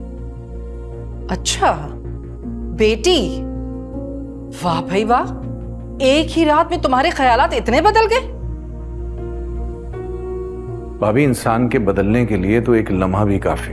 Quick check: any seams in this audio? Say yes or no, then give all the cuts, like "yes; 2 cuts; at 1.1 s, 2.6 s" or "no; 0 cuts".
no; 0 cuts